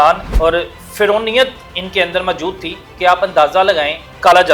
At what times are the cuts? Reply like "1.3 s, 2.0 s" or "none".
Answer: none